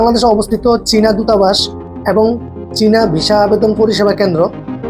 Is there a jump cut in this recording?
no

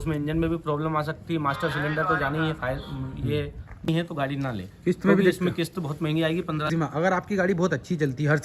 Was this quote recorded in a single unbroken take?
no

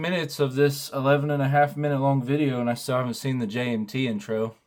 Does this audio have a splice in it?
no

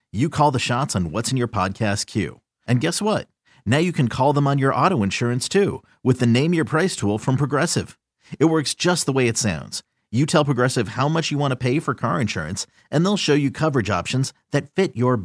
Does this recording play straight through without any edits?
yes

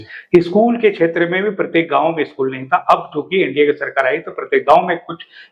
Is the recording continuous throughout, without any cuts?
yes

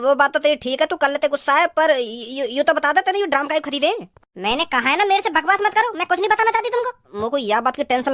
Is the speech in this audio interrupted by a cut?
yes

